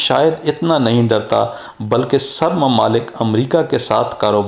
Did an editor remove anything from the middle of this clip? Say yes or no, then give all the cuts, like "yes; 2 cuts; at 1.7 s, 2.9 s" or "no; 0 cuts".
no; 0 cuts